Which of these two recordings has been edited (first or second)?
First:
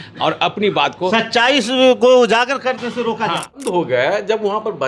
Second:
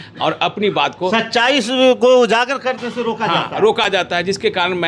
first